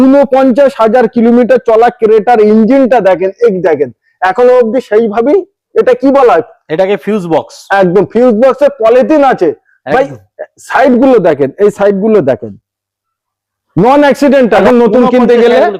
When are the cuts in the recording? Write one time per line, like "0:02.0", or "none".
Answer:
0:14.6